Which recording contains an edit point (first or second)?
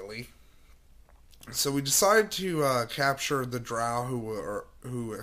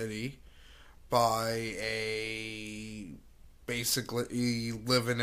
second